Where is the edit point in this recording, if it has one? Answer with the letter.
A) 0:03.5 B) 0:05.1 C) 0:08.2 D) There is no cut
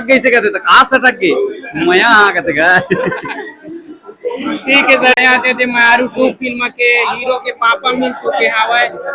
B